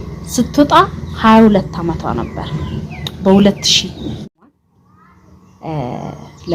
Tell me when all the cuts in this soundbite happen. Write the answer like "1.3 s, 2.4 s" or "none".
4.3 s